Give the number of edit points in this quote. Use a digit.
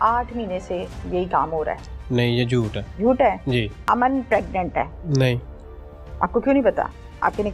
3